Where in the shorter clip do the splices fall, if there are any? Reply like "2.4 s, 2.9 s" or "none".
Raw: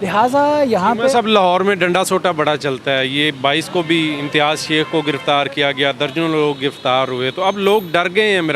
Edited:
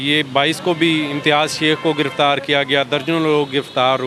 none